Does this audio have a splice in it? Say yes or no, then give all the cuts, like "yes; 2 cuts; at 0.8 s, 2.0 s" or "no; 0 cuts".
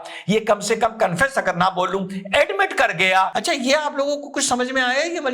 yes; 1 cut; at 3.3 s